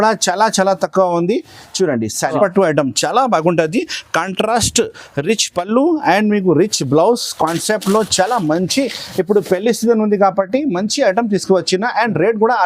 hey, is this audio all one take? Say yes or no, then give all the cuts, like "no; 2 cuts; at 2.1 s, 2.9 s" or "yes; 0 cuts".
no; 1 cut; at 2.4 s